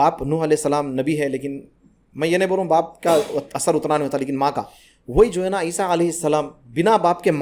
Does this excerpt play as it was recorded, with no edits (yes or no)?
yes